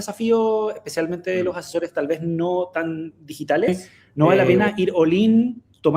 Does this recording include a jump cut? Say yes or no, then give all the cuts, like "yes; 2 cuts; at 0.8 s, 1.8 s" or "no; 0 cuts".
yes; 1 cut; at 3.7 s